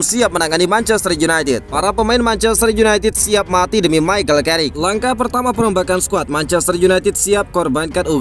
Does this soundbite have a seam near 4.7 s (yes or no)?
yes